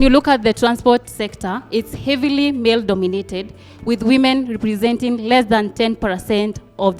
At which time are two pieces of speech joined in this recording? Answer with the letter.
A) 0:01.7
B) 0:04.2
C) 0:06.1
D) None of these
D